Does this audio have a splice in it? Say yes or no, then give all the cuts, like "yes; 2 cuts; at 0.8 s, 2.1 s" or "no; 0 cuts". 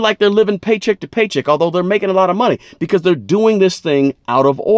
no; 0 cuts